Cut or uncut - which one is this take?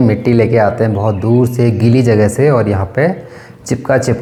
uncut